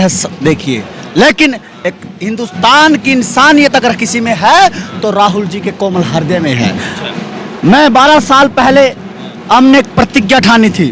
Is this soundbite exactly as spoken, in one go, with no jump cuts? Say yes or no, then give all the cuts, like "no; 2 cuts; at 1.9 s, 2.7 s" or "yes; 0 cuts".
yes; 0 cuts